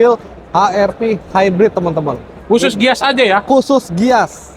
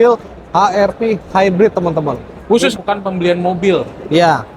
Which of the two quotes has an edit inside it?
second; 1 cut; at 2.8 s

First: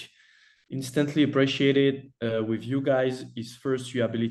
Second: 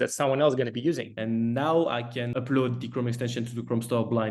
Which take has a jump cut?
second; 2 cuts; at 1.1 s, 2.3 s

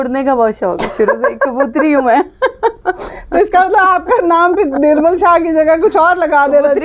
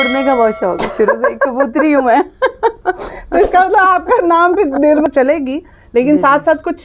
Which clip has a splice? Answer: second; 1 cut; at 5.1 s

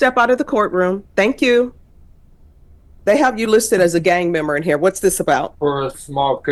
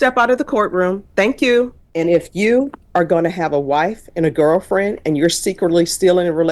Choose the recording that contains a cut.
second; 1 cut; at 1.8 s

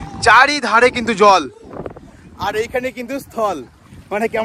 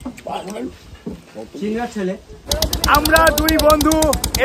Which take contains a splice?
second; 1 cut; at 2.5 s

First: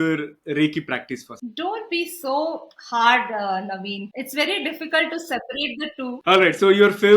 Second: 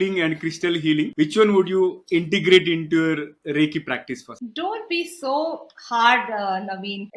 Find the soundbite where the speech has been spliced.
first; 1 cut; at 6.2 s

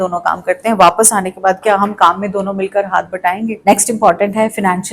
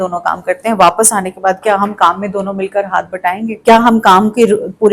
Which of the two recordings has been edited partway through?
first; 1 cut; at 3.6 s

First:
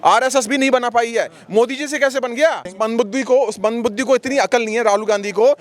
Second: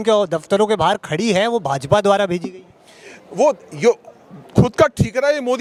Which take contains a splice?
first; 1 cut; at 2.7 s

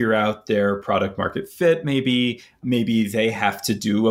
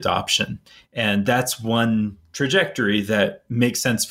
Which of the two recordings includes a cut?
first; 1 cut; at 2.6 s

